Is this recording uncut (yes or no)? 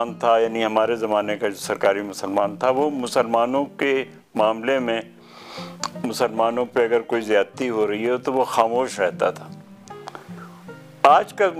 yes